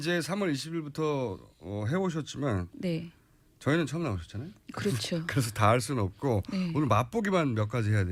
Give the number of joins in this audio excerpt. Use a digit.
0